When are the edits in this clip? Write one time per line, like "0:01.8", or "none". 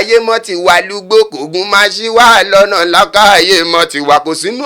none